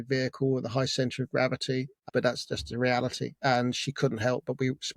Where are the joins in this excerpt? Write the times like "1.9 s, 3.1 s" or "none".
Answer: 2.0 s

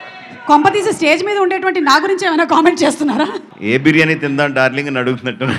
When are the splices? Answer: 3.5 s

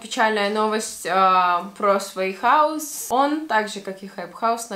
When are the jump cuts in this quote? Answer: 2.9 s

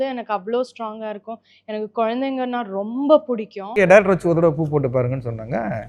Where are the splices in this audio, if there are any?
3.8 s

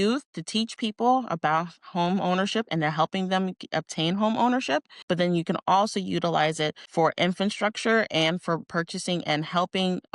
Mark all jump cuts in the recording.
4.9 s, 6.8 s

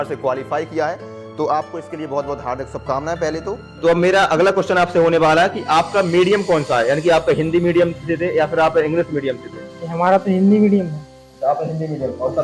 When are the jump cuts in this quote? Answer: none

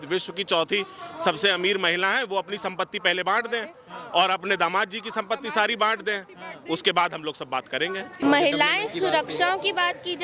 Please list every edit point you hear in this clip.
8.2 s

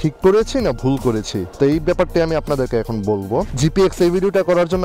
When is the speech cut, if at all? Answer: 3.5 s

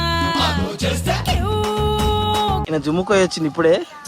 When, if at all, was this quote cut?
2.6 s

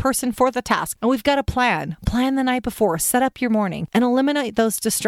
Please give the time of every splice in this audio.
0.9 s, 3.8 s

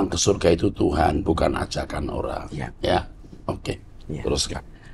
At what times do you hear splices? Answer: none

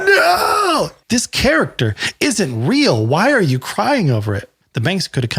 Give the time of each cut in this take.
1.0 s, 4.4 s

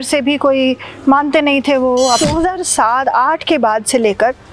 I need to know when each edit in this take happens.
2.2 s

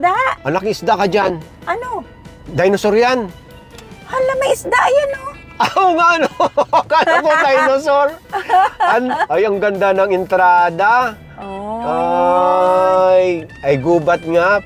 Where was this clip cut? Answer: none

